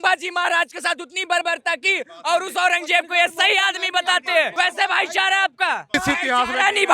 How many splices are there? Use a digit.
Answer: 2